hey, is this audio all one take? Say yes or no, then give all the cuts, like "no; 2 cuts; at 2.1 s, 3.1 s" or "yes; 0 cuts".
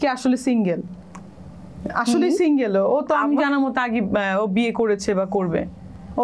yes; 0 cuts